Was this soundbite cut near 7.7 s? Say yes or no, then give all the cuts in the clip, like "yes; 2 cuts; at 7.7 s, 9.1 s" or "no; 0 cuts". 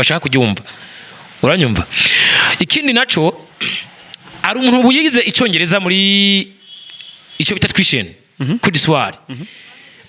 no; 0 cuts